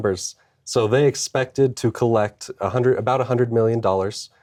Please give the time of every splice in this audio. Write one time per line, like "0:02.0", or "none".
none